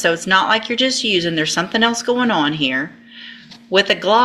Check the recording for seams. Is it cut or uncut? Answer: uncut